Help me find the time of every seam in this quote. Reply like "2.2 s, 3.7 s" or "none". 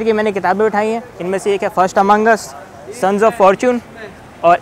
none